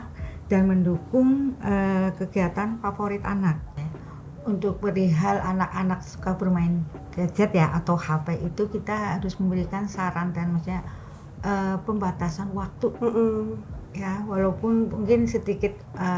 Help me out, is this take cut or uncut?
cut